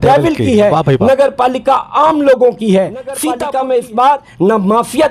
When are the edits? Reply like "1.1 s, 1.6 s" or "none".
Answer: 3.3 s

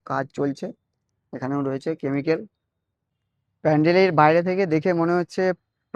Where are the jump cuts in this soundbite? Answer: 3.2 s

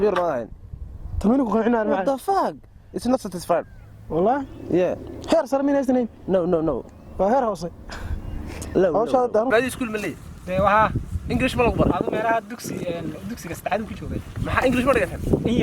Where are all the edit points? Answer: 9.5 s

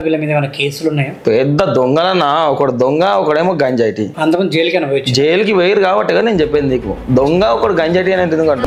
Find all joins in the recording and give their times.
4.1 s

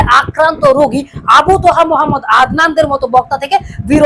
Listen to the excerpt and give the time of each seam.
none

